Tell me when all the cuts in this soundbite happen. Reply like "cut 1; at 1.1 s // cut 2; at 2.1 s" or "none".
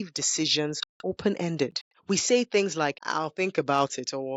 cut 1; at 0.9 s // cut 2; at 1.9 s // cut 3; at 3.0 s